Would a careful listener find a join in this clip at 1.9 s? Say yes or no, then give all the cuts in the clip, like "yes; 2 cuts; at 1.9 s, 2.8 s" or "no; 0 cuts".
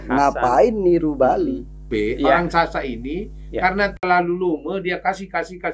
yes; 1 cut; at 1.9 s